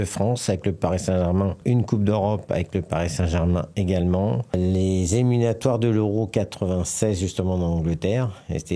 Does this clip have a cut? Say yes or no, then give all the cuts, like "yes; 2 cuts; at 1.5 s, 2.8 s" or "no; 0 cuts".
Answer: yes; 2 cuts; at 1.6 s, 4.5 s